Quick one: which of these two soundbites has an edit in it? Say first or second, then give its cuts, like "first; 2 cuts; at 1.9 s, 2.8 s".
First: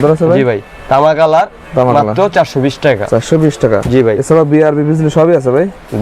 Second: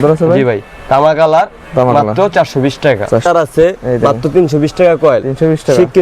second; 1 cut; at 3.2 s